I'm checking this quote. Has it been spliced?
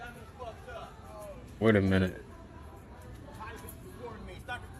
no; 0 cuts

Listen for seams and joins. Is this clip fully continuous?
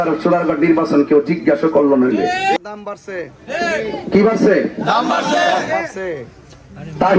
no; 1 cut; at 2.6 s

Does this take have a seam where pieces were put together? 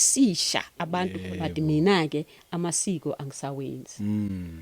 yes; 1 cut; at 1.2 s

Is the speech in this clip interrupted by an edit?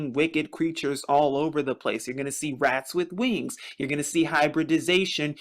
yes; 1 cut; at 3.2 s

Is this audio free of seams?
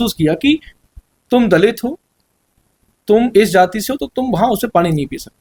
yes; 0 cuts

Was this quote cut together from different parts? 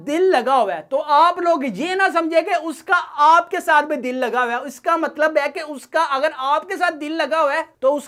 no; 0 cuts

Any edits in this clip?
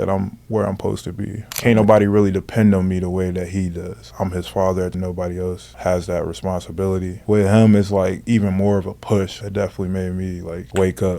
yes; 4 cuts; at 1.5 s, 4.9 s, 7.2 s, 9.4 s

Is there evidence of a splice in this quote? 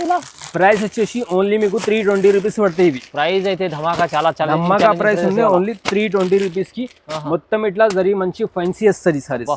no; 0 cuts

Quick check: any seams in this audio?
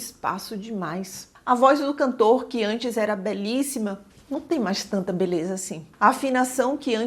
yes; 1 cut; at 1.3 s

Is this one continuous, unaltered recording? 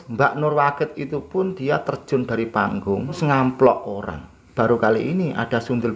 no; 2 cuts; at 3.2 s, 4.4 s

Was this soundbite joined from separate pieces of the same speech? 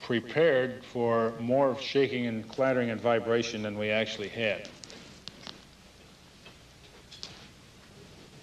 yes; 1 cut; at 5.7 s

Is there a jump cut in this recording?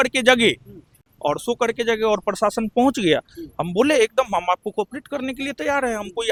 no; 0 cuts

